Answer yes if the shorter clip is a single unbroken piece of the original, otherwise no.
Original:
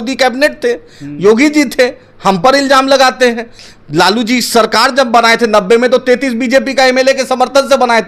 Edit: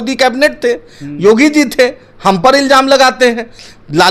yes